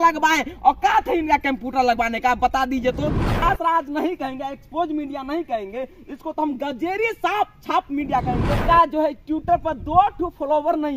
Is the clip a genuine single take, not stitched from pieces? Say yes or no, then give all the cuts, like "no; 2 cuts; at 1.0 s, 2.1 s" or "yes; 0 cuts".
no; 2 cuts; at 3.4 s, 8.6 s